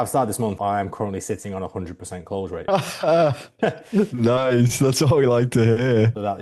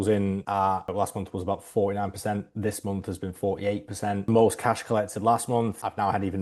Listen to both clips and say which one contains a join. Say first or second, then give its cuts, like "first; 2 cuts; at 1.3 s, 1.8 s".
second; 1 cut; at 4.2 s